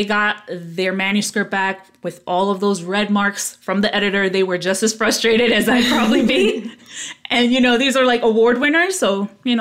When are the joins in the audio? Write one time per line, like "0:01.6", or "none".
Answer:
none